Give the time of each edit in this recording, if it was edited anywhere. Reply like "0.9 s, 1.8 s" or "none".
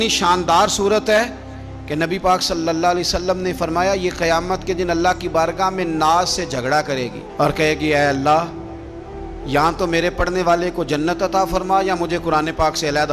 none